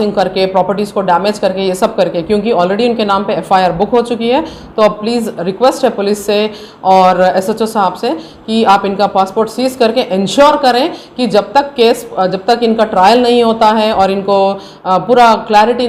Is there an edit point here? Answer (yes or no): no